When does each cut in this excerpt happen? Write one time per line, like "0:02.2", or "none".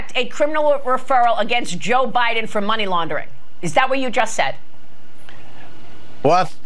none